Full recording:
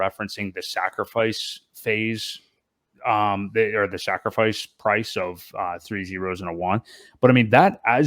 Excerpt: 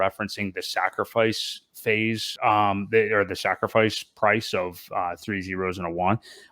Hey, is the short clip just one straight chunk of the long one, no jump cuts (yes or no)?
no